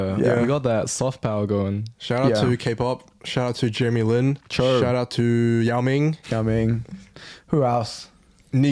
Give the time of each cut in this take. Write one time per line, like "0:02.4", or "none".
0:04.4
0:06.2

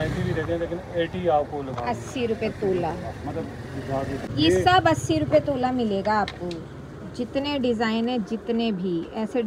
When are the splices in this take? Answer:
0:04.3

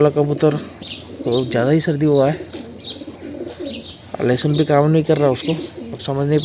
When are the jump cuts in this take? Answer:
none

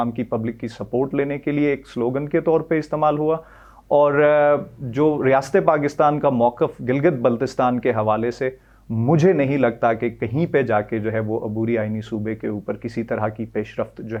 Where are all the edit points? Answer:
none

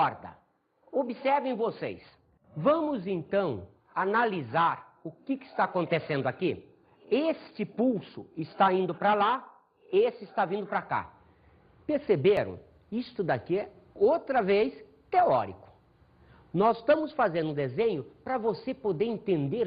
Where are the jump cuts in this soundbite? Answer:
0:12.9

